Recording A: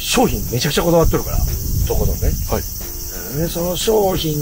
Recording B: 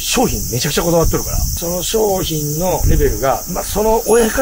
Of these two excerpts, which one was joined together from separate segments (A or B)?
B